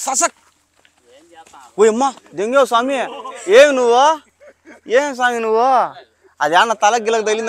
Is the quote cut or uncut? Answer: uncut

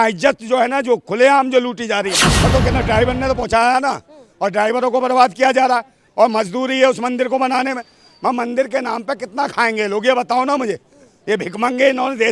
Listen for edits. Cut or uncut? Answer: cut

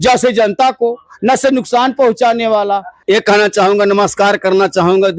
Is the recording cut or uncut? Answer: cut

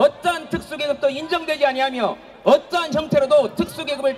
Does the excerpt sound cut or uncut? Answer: uncut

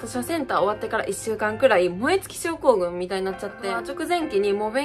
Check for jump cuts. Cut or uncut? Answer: cut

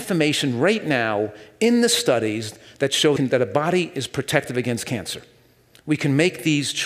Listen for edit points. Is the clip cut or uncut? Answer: cut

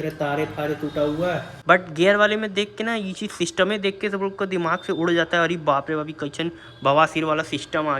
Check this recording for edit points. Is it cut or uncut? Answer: cut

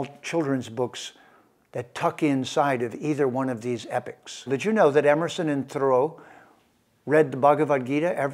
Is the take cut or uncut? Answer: cut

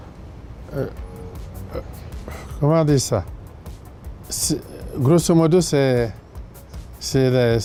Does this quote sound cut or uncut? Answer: uncut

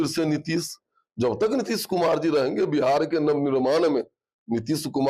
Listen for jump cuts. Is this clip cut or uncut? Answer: uncut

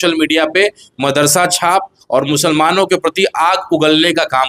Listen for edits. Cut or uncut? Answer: uncut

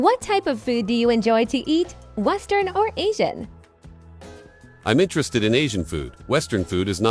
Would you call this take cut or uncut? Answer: uncut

